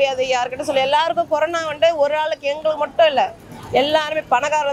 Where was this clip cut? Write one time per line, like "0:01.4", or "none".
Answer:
none